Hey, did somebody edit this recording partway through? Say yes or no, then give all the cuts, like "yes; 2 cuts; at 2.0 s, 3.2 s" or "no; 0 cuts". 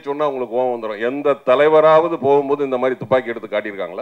no; 0 cuts